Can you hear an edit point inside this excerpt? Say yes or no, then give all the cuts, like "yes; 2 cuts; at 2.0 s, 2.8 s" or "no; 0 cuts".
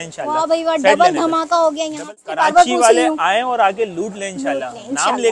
yes; 1 cut; at 2.1 s